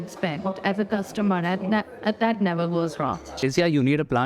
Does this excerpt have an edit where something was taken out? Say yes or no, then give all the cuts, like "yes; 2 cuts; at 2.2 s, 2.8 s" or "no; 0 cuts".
yes; 1 cut; at 3.2 s